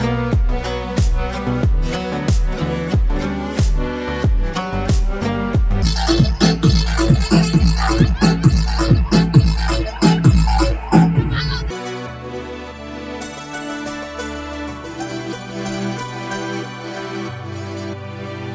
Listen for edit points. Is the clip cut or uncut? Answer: uncut